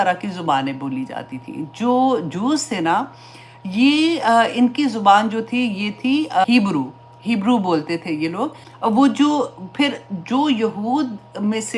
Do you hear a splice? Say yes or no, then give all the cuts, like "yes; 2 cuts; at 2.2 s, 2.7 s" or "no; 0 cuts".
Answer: no; 0 cuts